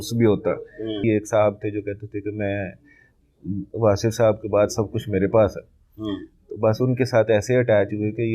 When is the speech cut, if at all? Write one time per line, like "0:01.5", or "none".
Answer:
0:01.0